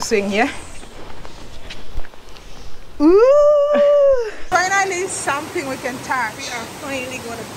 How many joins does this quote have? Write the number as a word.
one